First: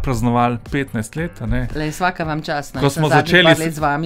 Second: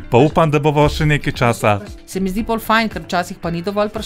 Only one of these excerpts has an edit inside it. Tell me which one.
second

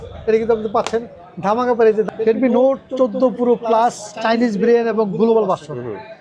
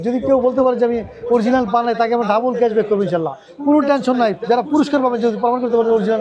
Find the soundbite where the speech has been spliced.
first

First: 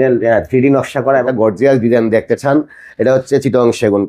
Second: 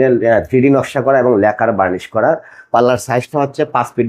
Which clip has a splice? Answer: first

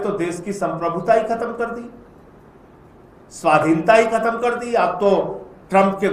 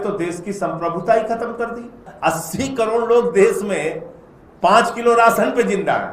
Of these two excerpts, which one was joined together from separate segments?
second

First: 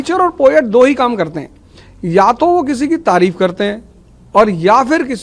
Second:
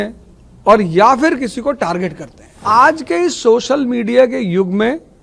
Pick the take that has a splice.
second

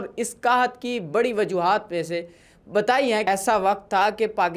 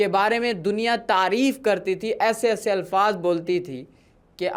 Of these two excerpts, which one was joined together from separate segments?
first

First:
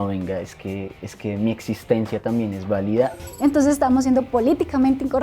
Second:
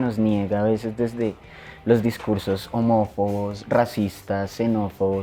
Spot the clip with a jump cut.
first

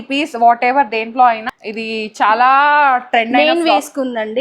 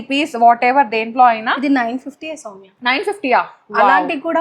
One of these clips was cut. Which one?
first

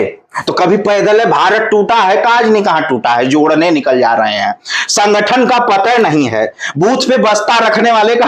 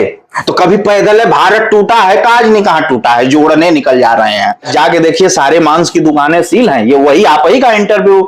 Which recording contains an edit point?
second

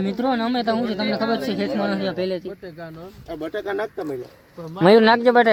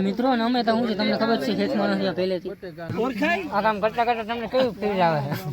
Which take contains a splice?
second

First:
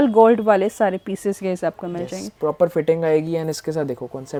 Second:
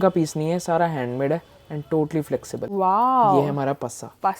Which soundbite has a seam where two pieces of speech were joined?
second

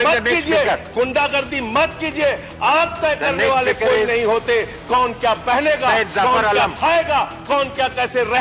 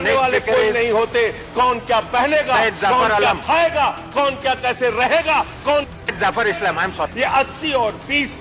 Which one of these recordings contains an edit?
second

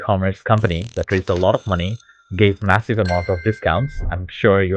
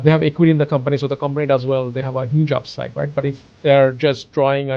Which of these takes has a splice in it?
second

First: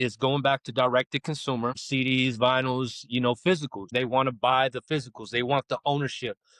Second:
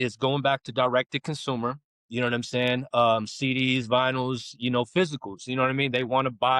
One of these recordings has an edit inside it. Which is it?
first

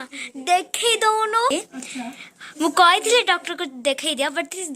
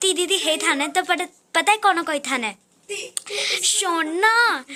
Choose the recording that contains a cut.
first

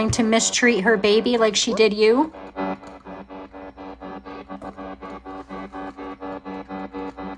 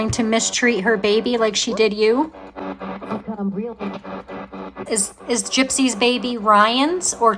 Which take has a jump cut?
second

